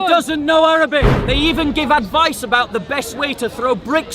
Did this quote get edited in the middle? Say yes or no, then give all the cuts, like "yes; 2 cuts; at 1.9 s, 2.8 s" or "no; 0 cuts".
yes; 1 cut; at 1.2 s